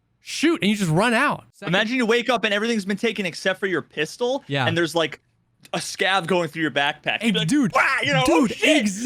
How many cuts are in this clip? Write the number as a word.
one